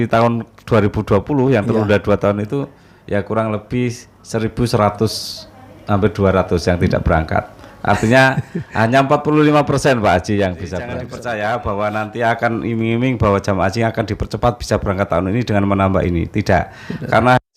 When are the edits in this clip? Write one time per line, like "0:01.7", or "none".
0:11.0